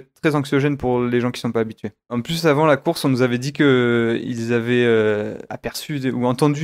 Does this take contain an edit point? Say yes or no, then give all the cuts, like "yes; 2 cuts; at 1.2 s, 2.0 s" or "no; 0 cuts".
yes; 1 cut; at 2.2 s